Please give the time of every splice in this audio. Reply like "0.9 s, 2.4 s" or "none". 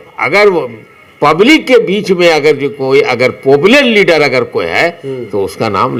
none